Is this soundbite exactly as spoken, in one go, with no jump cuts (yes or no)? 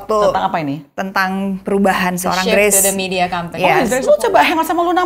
no